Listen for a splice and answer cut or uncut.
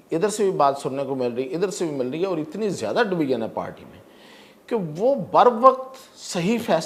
uncut